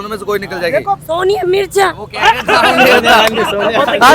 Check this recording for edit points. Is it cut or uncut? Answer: uncut